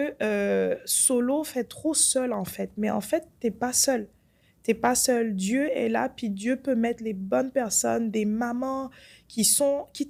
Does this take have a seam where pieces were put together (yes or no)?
no